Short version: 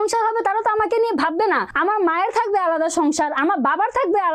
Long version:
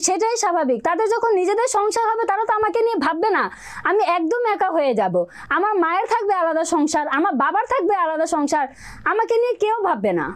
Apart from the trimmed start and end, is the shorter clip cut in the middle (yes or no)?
yes